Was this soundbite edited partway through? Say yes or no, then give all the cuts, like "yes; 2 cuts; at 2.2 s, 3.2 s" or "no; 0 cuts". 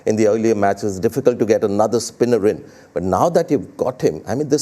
no; 0 cuts